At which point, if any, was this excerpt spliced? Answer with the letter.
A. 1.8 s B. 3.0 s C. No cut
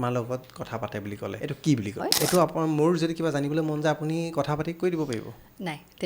A